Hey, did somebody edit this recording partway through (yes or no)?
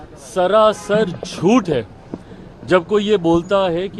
no